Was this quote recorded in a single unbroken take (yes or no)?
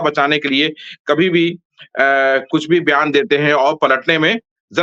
yes